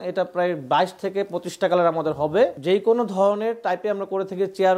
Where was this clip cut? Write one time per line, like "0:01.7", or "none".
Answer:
0:02.6